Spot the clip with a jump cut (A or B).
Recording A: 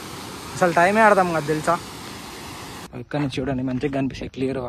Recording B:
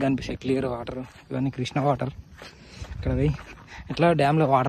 A